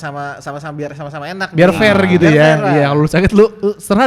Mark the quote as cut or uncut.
uncut